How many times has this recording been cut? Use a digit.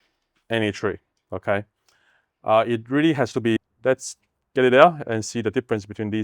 1